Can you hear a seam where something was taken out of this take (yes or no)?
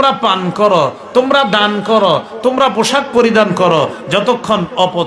no